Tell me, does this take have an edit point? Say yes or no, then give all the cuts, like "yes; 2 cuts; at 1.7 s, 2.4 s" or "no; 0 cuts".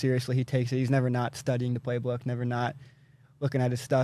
no; 0 cuts